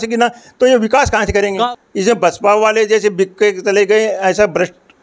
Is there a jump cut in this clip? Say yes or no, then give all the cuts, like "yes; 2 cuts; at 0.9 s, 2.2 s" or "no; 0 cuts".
yes; 1 cut; at 1.7 s